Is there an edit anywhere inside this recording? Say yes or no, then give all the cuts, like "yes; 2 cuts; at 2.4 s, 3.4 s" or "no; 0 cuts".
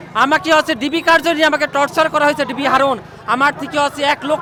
no; 0 cuts